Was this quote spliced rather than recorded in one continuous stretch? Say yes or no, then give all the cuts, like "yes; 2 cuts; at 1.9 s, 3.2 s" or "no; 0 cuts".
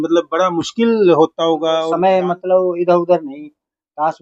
yes; 1 cut; at 1.8 s